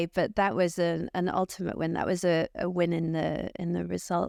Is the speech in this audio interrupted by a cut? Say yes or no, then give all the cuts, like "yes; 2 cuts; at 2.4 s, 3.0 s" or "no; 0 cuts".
no; 0 cuts